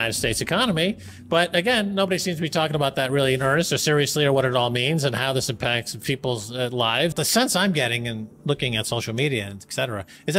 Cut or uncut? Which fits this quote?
cut